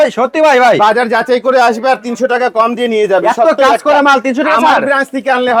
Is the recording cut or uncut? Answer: uncut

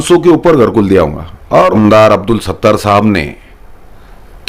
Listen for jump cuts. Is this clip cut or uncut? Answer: cut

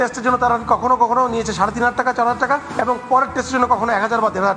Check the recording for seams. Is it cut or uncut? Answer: uncut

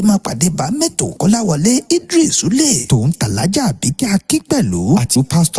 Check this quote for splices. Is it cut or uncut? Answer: cut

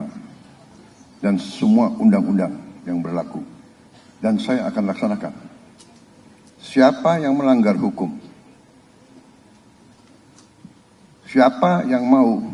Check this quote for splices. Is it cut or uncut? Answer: uncut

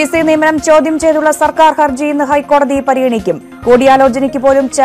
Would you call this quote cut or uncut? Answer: uncut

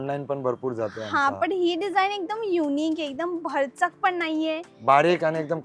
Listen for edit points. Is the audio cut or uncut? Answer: uncut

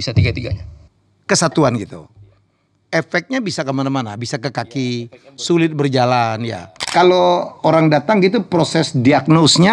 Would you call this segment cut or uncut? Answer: cut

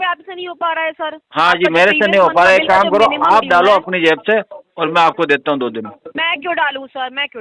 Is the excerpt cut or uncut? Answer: uncut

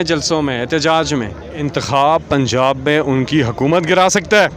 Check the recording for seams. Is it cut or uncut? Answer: cut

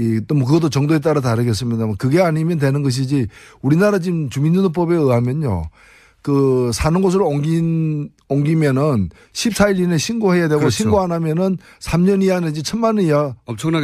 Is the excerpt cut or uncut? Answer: cut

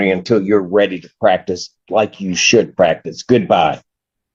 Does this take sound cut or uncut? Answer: uncut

